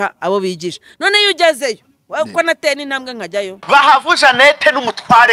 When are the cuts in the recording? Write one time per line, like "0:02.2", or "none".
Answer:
0:03.6